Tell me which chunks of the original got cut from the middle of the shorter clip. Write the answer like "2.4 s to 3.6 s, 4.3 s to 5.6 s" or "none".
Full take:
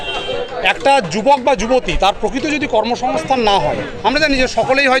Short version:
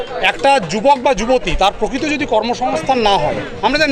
none

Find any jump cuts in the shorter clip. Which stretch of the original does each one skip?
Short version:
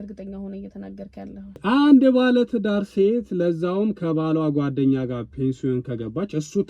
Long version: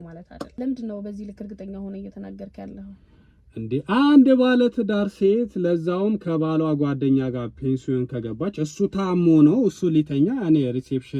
3.0 s to 3.8 s

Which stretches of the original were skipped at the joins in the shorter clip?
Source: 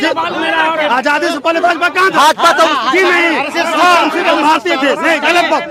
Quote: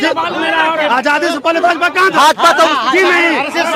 none

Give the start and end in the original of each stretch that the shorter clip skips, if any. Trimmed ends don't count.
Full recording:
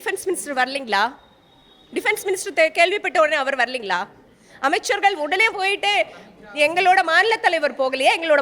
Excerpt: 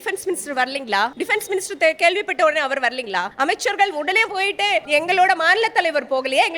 1.1 s to 1.9 s, 4.1 s to 4.5 s, 6.1 s to 6.5 s

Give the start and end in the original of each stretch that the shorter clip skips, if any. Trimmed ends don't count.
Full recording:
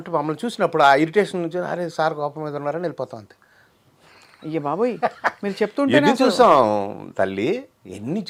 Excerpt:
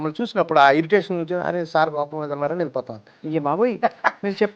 3.3 s to 4.2 s

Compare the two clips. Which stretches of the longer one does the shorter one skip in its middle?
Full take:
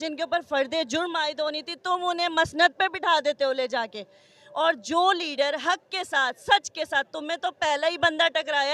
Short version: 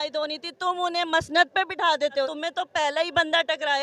3.5 s to 7.2 s

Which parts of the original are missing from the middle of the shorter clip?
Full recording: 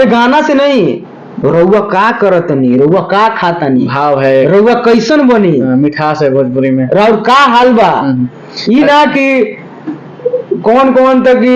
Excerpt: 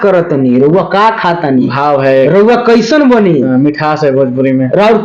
none

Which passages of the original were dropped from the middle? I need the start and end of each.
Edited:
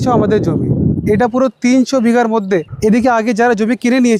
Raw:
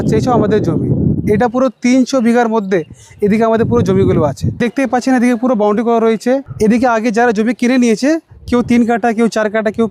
2.9 s to 6.5 s

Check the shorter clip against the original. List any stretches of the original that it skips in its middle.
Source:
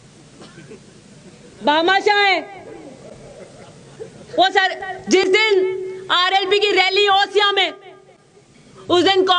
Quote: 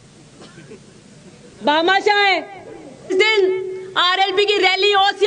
3.1 s to 5.2 s

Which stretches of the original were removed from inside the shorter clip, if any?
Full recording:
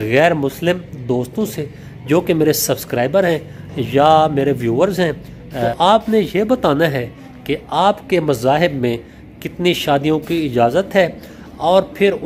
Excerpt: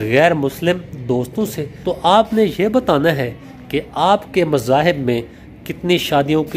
1.8 s to 5.6 s

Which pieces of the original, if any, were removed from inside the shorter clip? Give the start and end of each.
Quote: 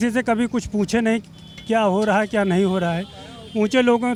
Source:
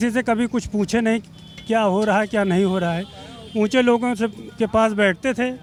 none

